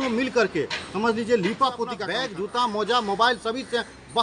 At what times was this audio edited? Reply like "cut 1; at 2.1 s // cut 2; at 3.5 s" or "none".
cut 1; at 2.0 s